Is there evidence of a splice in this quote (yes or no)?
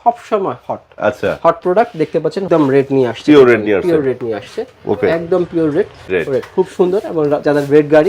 yes